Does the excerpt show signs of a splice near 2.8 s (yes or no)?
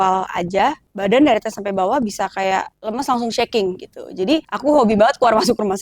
yes